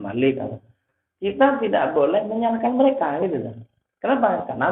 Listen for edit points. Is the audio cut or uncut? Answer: uncut